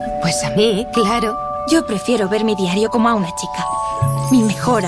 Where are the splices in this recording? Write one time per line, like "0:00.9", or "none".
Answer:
none